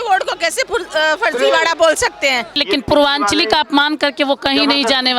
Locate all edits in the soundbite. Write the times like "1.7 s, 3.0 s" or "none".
2.6 s

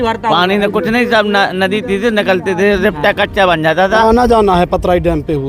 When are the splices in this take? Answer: 4.0 s

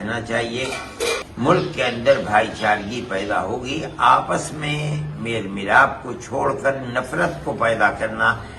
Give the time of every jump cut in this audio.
1.3 s

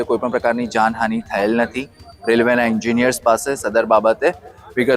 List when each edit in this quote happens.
none

